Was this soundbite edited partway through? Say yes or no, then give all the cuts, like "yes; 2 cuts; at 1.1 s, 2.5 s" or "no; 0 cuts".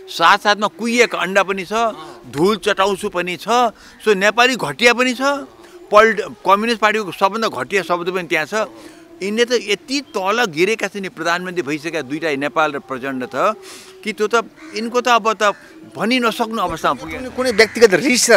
no; 0 cuts